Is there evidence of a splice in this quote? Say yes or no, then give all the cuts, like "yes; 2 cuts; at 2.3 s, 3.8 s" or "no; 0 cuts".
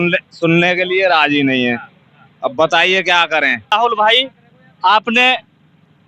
no; 0 cuts